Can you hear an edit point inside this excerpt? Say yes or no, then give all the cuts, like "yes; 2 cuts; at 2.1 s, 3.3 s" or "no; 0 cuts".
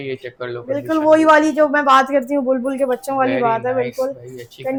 no; 0 cuts